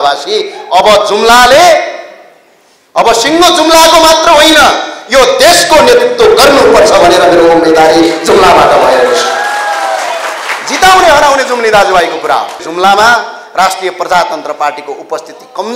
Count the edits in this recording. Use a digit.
1